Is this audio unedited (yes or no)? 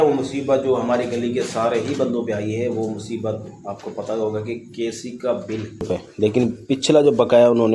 no